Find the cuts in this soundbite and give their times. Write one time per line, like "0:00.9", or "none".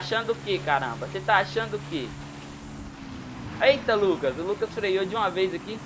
none